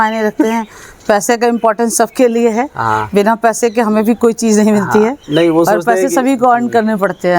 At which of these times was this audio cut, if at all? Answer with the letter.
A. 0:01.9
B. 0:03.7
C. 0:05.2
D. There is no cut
D